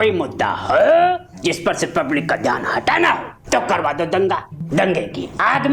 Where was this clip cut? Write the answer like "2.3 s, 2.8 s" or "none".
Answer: 3.3 s, 4.5 s